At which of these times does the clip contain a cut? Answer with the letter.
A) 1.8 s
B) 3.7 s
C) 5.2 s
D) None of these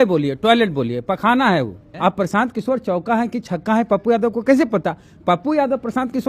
A